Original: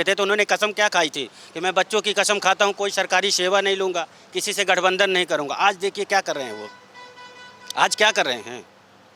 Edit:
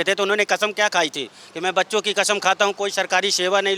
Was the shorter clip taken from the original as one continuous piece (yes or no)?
yes